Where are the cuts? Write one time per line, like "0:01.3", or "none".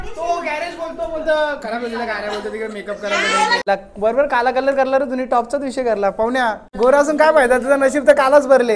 0:03.6
0:06.6